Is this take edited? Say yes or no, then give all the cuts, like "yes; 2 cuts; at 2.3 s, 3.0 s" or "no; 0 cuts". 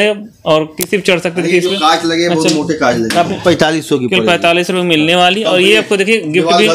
yes; 1 cut; at 3.4 s